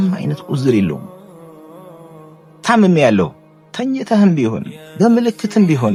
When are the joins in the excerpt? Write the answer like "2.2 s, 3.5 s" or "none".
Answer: none